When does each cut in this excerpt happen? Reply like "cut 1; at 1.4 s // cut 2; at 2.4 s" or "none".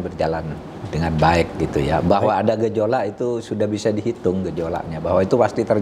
none